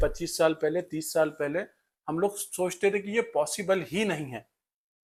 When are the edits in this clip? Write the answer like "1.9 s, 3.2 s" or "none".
none